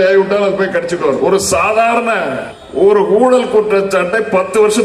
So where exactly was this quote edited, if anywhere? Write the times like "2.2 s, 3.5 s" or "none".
1.2 s, 2.5 s